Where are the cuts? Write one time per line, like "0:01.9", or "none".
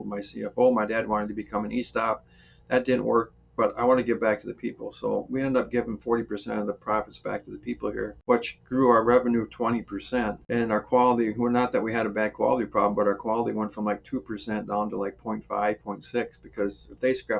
0:08.2
0:10.4